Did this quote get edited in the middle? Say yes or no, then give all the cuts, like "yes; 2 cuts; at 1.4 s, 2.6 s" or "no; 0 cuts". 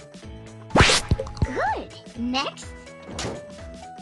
yes; 1 cut; at 1.4 s